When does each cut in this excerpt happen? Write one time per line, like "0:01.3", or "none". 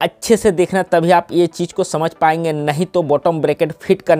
none